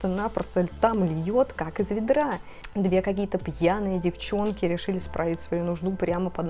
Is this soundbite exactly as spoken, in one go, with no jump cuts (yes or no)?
no